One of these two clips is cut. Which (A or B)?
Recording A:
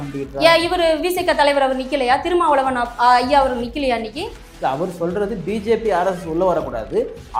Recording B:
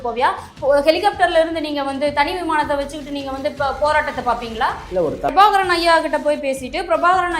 B